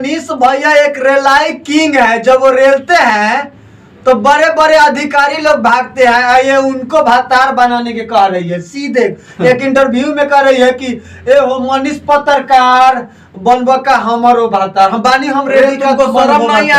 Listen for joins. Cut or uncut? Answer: uncut